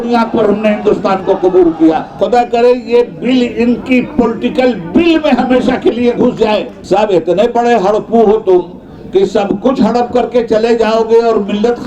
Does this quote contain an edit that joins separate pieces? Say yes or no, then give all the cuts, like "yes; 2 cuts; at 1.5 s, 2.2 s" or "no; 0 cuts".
yes; 2 cuts; at 2.1 s, 6.7 s